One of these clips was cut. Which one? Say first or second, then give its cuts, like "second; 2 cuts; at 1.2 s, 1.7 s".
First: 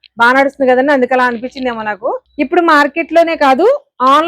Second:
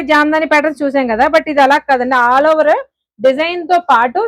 first; 1 cut; at 2.3 s